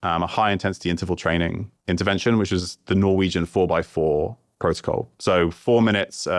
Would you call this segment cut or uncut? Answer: uncut